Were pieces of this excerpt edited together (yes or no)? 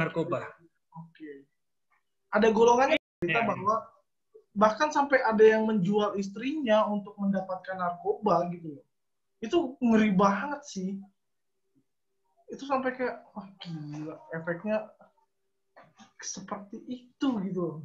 yes